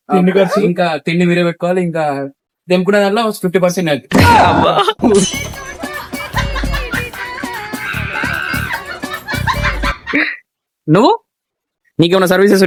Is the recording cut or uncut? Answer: uncut